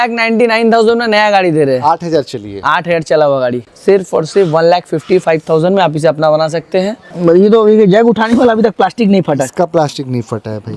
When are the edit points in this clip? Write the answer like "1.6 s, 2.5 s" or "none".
3.6 s, 7.0 s